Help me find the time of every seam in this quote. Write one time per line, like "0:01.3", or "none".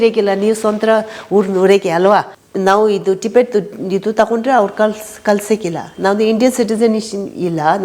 0:02.4